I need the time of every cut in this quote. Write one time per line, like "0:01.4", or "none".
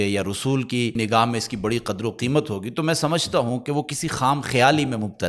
0:01.0